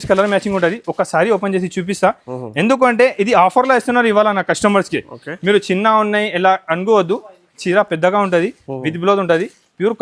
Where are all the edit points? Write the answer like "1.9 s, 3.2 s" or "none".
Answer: none